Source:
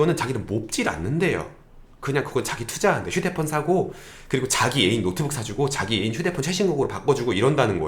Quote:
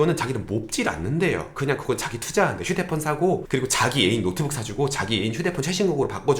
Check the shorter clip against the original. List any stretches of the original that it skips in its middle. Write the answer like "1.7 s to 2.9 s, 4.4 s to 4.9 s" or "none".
1.5 s to 2.0 s, 3.9 s to 4.2 s